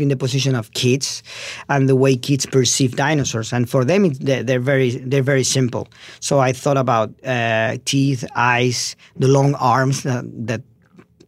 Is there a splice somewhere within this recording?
no; 0 cuts

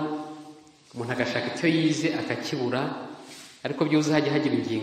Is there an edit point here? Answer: no; 0 cuts

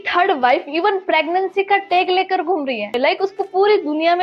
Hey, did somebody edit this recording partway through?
yes; 1 cut; at 2.9 s

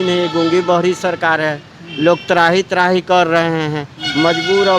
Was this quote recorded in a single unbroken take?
yes; 0 cuts

